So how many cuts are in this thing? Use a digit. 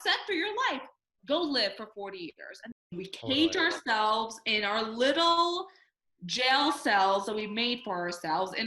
1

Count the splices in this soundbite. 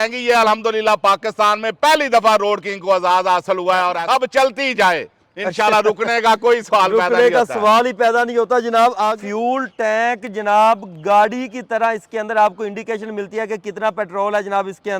2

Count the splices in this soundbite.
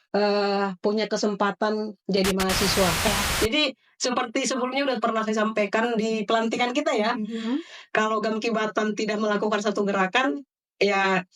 1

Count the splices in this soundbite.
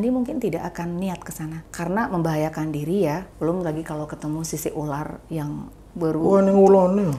2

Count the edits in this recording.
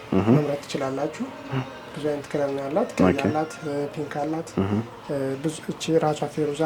0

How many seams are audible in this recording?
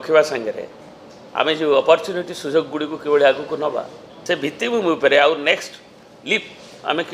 1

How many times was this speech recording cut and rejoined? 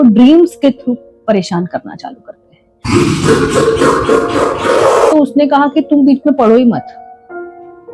1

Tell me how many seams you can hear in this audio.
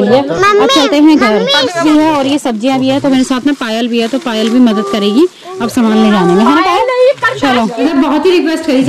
2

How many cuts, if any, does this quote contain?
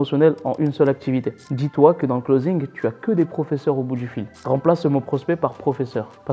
2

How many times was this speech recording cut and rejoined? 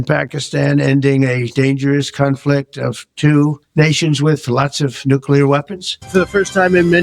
1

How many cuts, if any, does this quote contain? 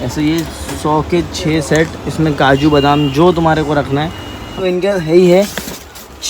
1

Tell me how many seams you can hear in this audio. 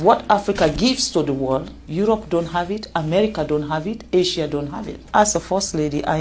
2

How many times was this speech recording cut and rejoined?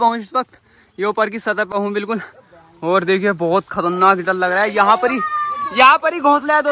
0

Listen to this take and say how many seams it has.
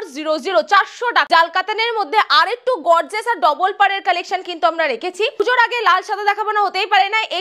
2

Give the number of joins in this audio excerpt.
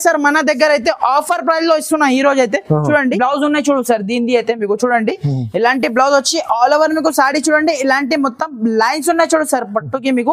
1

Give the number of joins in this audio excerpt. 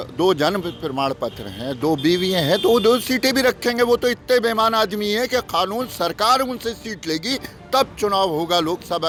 0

